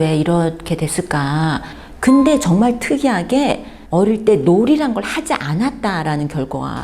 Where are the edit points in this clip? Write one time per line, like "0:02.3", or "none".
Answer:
0:01.7
0:03.7